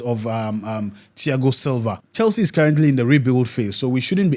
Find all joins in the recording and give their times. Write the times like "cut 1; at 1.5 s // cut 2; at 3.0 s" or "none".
cut 1; at 2.0 s